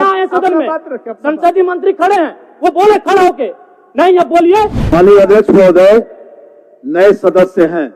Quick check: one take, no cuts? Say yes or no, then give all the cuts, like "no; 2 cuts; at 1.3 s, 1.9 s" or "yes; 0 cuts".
no; 1 cut; at 4.8 s